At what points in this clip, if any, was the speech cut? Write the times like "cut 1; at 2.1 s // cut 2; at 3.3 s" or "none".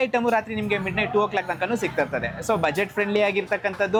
none

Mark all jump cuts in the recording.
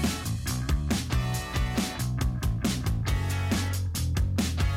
cut 1; at 2.3 s

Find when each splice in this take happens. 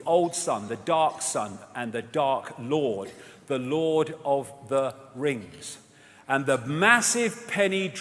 cut 1; at 5.9 s

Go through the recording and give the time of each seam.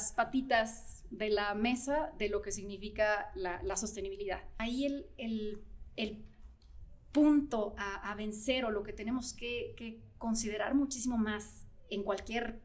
cut 1; at 4.5 s

